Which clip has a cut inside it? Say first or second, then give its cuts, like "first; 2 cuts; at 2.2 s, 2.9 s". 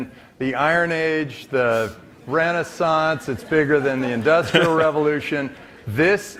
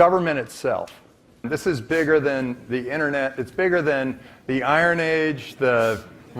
second; 1 cut; at 1.4 s